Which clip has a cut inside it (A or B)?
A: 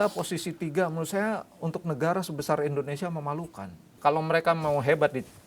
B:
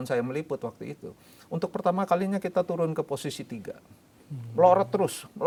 A